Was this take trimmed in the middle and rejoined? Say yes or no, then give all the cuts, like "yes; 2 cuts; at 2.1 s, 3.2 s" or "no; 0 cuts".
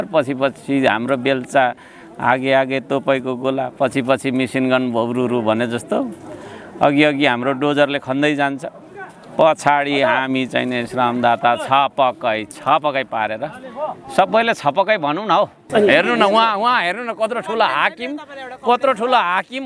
yes; 1 cut; at 15.7 s